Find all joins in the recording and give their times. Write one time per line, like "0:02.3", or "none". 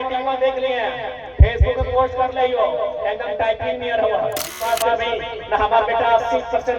0:04.7